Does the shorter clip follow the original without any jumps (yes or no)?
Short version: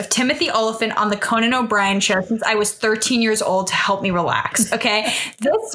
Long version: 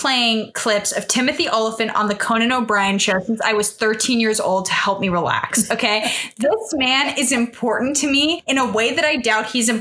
yes